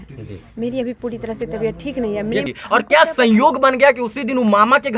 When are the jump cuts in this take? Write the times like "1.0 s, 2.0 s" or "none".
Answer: 2.5 s